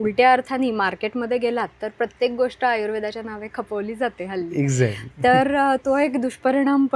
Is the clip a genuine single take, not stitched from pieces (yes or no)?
yes